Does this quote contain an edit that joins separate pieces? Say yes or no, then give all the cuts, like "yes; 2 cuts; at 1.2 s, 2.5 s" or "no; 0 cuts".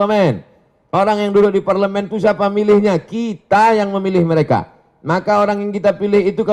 no; 0 cuts